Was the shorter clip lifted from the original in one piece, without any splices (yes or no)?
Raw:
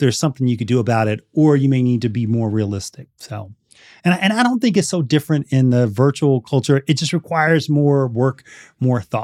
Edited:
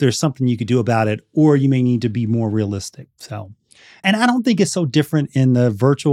no